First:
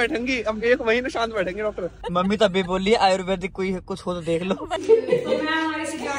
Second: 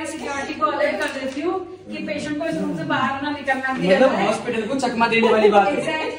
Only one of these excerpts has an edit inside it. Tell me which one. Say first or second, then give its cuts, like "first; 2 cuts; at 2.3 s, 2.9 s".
first; 2 cuts; at 2.0 s, 4.8 s